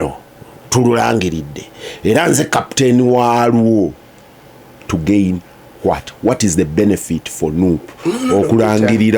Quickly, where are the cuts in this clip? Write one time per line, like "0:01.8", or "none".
none